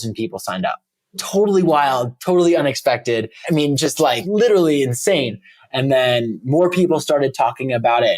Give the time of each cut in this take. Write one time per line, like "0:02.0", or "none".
0:01.2
0:03.3
0:04.2
0:05.5